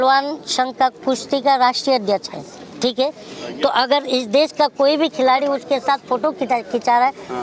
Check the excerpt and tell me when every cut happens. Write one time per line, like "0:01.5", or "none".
none